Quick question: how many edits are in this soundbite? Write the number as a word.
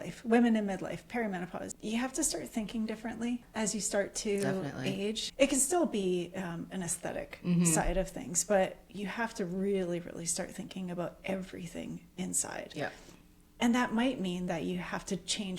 three